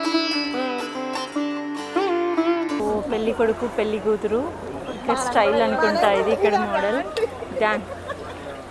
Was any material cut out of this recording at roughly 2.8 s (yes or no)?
yes